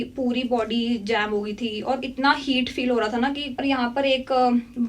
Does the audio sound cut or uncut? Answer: cut